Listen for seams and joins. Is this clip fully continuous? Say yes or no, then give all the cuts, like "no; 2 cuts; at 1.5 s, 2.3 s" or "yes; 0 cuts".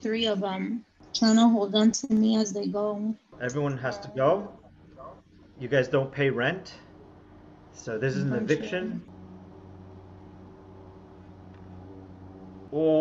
yes; 0 cuts